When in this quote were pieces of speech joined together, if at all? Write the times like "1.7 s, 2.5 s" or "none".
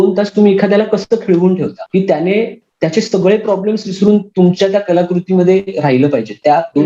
1.8 s, 2.6 s

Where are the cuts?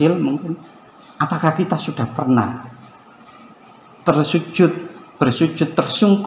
none

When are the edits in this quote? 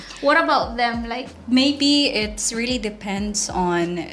1.3 s

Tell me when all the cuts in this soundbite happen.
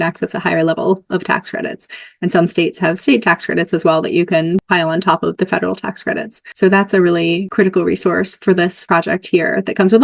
5.4 s, 6.4 s, 7.5 s, 8.8 s

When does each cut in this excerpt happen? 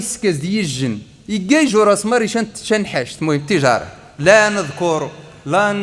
none

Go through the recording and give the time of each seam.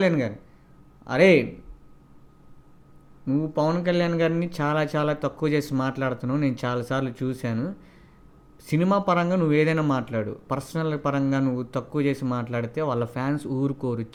none

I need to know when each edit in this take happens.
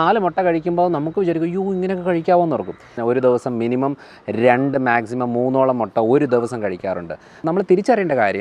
2.9 s, 7.3 s

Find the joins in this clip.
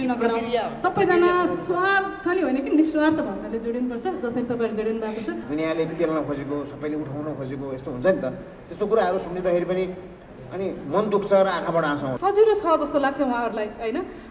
5.4 s, 12.1 s

